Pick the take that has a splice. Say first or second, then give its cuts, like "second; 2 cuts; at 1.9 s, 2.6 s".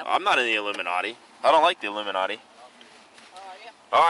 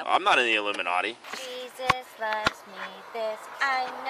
second; 1 cut; at 1.2 s